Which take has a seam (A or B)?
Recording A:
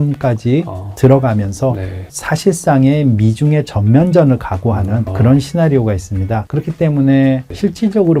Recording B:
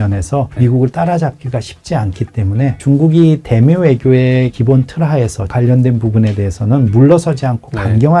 B